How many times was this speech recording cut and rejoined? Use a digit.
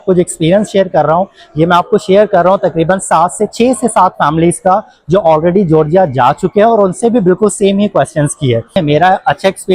1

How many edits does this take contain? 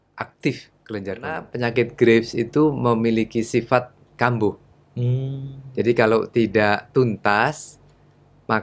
1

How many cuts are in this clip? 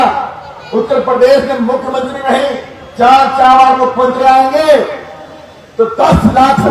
1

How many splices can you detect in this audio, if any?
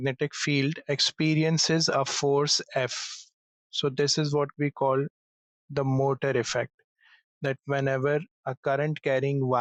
0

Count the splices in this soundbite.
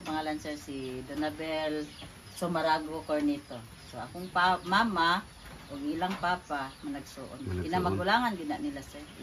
0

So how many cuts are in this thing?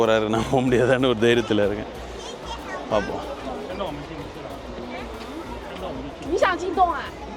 0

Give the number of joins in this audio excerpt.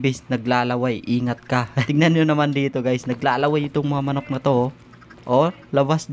1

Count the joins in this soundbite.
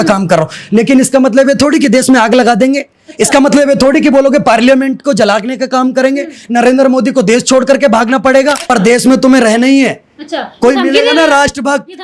1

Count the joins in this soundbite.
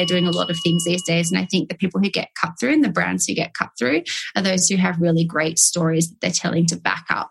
0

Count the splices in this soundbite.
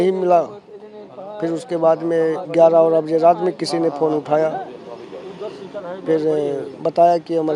0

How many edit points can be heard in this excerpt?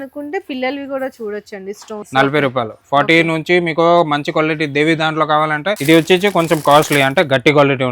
2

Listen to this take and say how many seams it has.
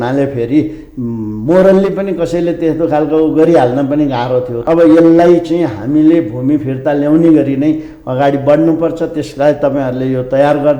1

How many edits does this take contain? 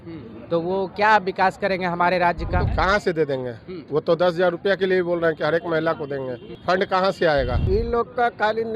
3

